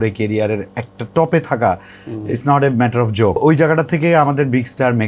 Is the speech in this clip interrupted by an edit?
yes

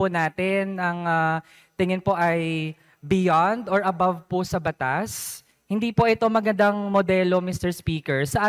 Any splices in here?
no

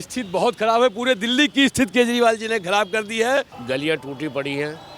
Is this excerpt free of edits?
no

